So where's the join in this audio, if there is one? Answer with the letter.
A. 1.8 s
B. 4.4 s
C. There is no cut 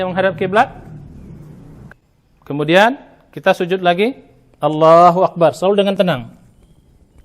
A